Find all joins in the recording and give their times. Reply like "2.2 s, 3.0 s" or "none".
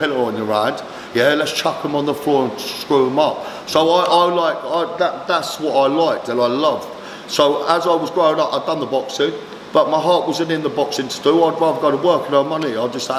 none